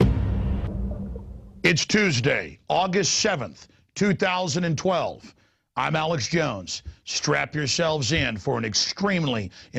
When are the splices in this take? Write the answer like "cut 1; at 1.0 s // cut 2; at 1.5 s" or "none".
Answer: none